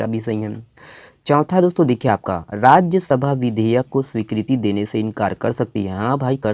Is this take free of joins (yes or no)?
yes